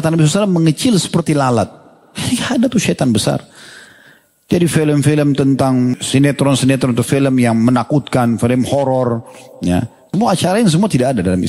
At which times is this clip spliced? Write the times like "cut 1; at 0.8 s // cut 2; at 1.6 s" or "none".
cut 1; at 5.9 s // cut 2; at 10.1 s